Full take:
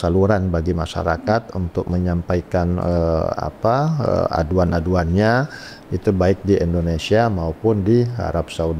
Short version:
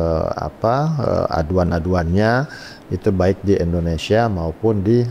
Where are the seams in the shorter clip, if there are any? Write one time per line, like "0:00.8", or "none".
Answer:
none